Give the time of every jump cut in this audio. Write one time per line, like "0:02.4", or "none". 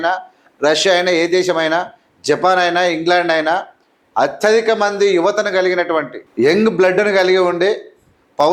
0:06.2